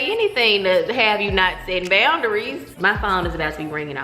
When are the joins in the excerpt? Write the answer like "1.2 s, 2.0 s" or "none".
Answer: 2.7 s